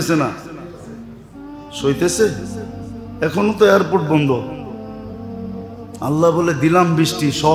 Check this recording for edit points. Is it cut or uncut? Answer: cut